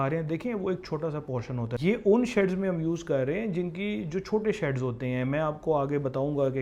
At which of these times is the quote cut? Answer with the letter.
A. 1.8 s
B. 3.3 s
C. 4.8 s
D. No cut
A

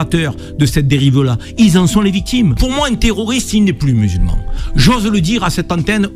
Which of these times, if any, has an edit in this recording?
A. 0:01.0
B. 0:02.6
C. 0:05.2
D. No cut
B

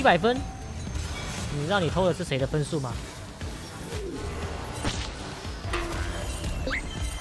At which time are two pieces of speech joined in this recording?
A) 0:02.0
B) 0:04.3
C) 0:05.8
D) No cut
D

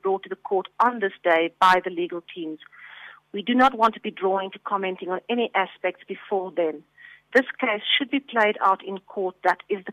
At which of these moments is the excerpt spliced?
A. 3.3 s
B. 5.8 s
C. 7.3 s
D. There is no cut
D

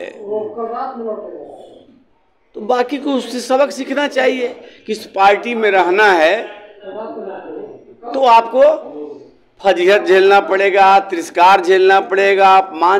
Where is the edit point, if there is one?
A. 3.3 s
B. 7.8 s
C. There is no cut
C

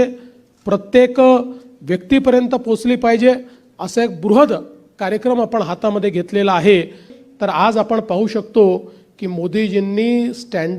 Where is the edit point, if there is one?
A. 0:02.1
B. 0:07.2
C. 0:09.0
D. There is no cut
B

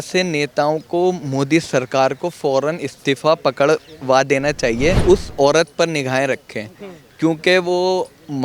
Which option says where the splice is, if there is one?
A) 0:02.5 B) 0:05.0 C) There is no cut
B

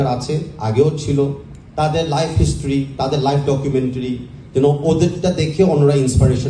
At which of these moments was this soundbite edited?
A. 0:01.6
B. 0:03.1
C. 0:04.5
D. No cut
D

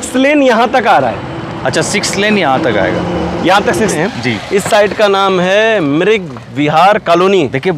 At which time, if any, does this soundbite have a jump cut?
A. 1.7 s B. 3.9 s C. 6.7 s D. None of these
B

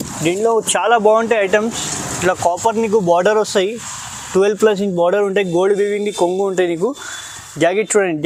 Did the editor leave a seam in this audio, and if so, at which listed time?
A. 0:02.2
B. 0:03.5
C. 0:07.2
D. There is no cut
D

